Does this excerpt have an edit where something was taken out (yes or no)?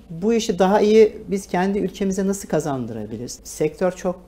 yes